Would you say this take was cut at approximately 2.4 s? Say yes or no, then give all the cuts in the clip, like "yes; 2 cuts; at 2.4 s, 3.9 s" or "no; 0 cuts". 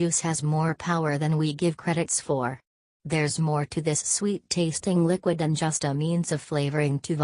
no; 1 cut; at 5.3 s